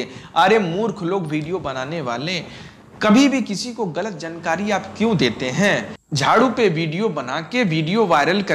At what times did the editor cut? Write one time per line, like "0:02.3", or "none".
0:06.0